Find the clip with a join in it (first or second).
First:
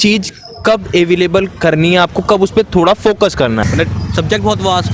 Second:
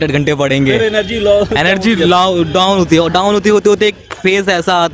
first